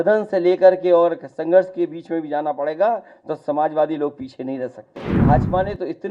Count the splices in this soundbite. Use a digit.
1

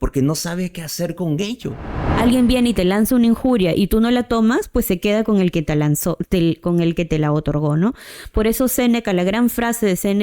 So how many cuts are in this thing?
1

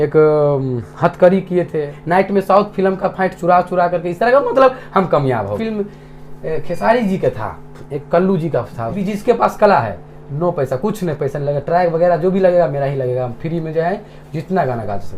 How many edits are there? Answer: 3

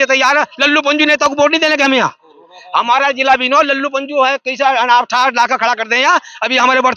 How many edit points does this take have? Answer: 0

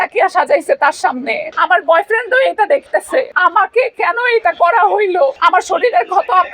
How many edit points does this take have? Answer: 3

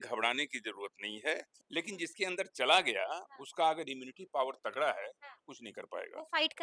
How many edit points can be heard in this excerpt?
1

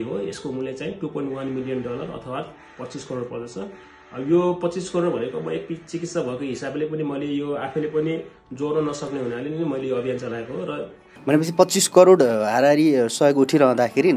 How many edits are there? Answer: 1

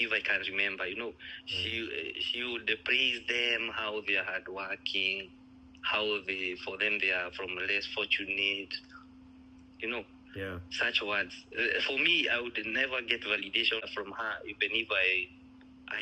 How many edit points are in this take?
1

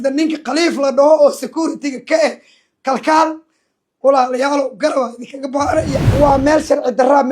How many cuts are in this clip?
1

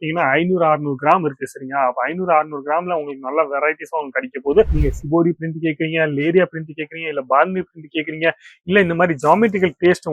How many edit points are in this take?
1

